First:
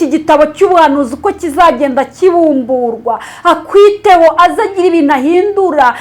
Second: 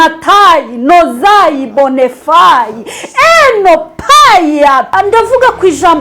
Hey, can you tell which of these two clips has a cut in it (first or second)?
second